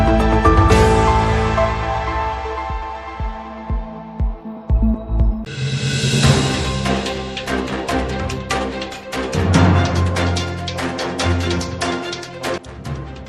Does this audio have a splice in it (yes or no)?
yes